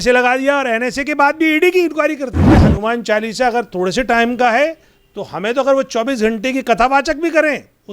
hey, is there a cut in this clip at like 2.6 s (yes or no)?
yes